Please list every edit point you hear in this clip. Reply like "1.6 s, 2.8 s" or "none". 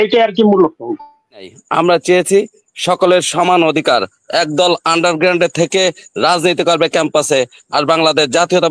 1.5 s